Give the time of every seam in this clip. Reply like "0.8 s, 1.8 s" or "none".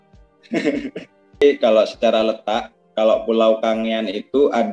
1.4 s